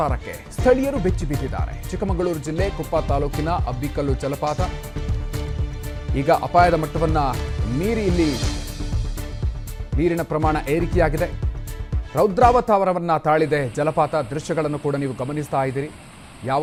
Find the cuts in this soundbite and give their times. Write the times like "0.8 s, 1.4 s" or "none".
none